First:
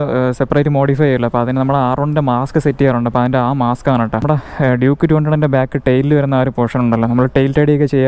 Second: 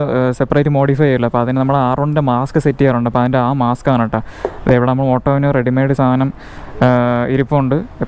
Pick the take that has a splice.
first; 1 cut; at 4.2 s

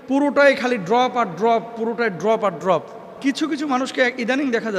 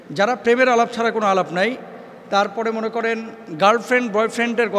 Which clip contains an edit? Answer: first; 1 cut; at 3.2 s

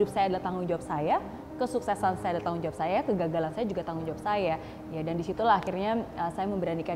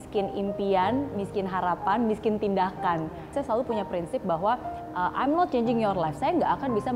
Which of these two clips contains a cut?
second; 1 cut; at 3.3 s

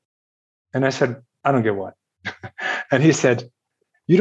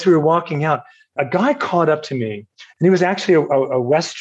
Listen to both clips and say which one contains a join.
second; 1 cut; at 1.1 s

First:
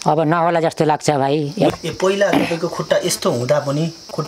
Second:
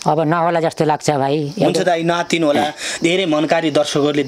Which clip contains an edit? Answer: first; 1 cut; at 1.7 s

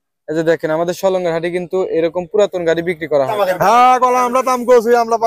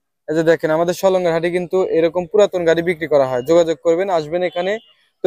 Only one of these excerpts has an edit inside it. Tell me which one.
first; 1 cut; at 3.3 s

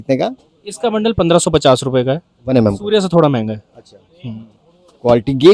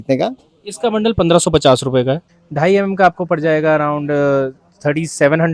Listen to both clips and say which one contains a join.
second; 1 cut; at 2.3 s

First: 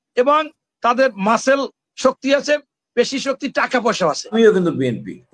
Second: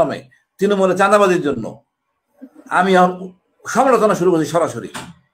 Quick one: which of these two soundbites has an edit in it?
first; 1 cut; at 4.3 s

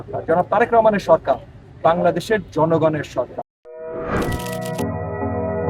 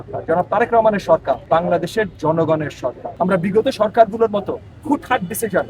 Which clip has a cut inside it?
second; 2 cuts; at 1.4 s, 3.0 s

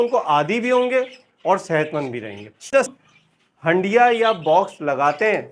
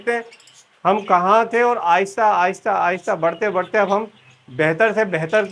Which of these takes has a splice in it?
first; 1 cut; at 2.9 s

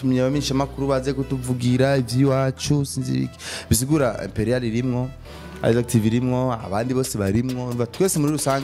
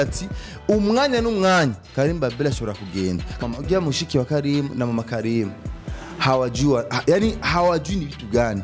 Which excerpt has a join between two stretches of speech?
second; 1 cut; at 3.4 s

